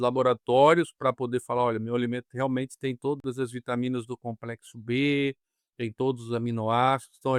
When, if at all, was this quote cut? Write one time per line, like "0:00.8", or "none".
none